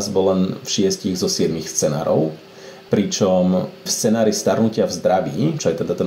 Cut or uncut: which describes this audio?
uncut